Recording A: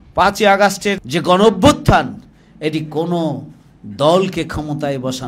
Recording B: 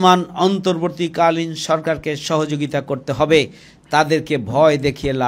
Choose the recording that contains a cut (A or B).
A